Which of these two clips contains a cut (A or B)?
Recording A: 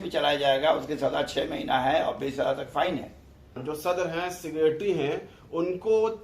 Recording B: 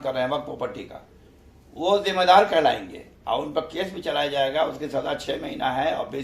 A